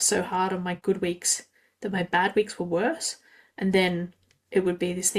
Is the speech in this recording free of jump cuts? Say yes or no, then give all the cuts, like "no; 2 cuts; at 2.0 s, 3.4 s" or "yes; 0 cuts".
yes; 0 cuts